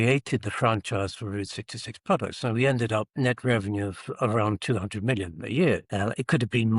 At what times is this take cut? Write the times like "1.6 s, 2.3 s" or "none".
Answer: 3.1 s, 5.9 s